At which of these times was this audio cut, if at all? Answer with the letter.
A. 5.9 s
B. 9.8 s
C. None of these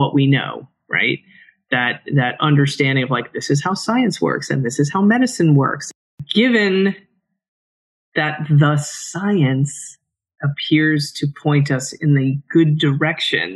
A